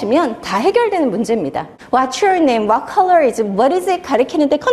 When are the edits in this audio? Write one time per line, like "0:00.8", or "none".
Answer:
0:01.7